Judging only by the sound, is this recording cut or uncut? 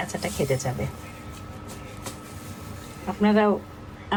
uncut